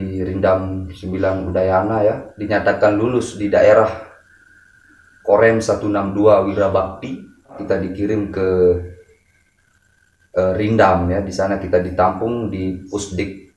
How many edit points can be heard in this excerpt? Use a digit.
2